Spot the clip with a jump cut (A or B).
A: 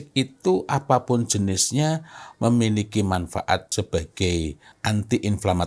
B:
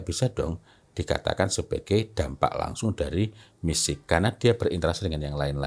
A